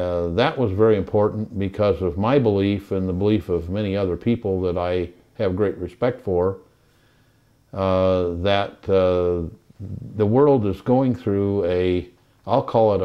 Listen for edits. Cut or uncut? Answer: uncut